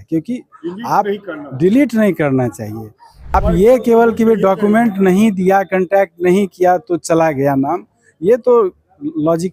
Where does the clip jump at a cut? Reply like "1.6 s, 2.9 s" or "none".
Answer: 3.3 s